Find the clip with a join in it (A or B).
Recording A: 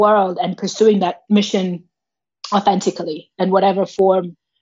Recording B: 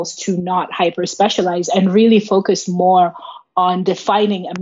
A